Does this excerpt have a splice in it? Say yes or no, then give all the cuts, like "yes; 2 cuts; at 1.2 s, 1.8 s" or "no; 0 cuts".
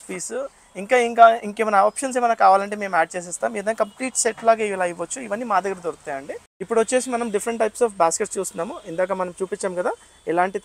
no; 0 cuts